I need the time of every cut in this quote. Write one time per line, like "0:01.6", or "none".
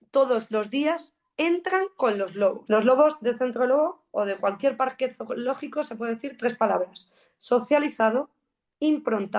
0:02.6